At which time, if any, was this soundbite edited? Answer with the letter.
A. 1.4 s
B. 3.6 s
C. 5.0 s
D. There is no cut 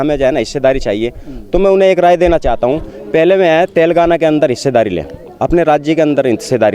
D